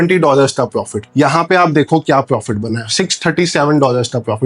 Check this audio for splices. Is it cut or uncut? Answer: uncut